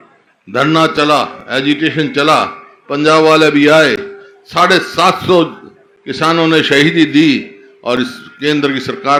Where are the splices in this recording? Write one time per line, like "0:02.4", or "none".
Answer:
none